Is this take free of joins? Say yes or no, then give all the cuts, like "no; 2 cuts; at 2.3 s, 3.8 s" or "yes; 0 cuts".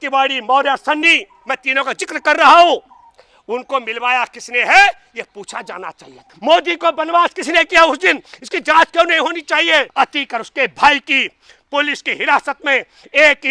no; 2 cuts; at 6.3 s, 9.9 s